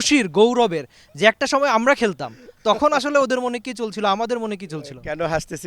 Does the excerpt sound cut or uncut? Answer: uncut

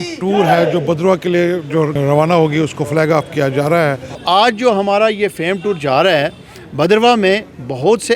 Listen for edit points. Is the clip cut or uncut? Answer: cut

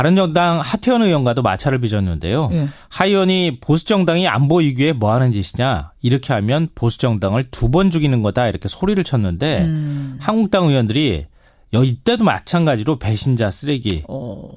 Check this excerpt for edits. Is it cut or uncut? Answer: uncut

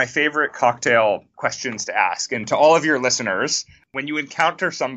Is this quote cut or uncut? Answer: cut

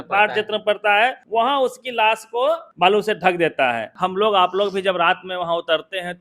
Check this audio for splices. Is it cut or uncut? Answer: cut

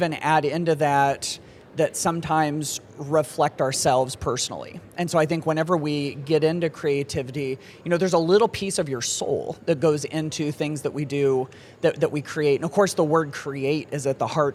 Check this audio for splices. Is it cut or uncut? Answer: uncut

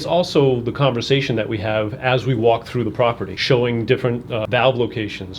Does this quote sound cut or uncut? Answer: cut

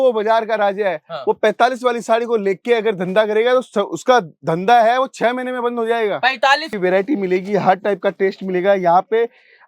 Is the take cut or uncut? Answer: cut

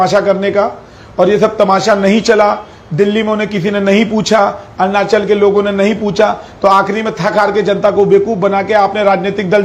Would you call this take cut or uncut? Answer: uncut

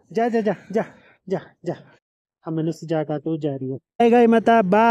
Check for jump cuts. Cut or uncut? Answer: cut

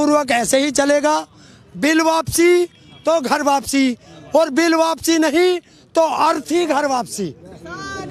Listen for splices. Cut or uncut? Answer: uncut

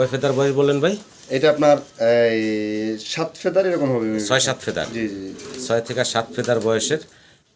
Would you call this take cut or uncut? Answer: uncut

